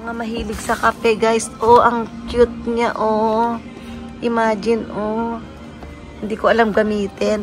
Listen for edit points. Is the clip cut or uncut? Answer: uncut